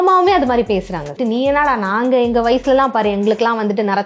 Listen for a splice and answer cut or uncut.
cut